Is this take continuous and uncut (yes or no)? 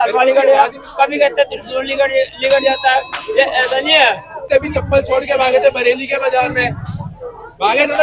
no